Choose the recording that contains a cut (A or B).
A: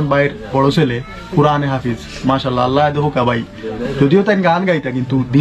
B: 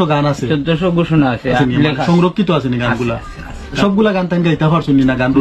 B